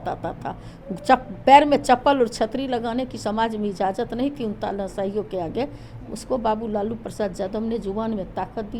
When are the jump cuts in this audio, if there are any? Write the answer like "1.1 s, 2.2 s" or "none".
none